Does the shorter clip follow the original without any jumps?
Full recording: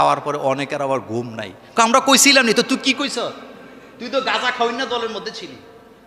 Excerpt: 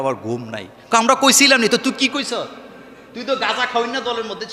yes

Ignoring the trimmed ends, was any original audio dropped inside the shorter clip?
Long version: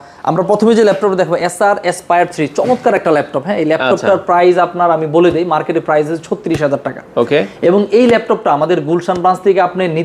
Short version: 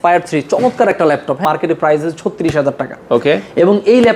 yes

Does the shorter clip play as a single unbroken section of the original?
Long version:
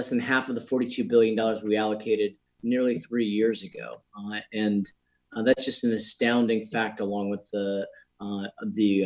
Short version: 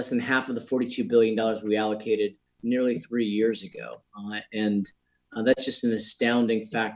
yes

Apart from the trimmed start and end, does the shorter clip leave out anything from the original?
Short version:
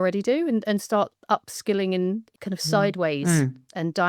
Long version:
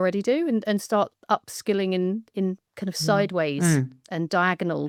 yes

